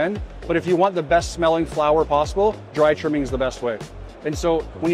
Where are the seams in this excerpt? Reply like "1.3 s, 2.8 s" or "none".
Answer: 4.0 s